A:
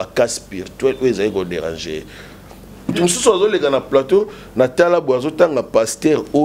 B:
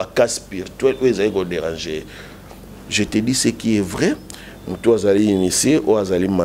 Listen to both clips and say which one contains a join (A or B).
A